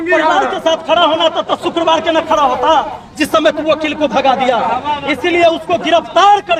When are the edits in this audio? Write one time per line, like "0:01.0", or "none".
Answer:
none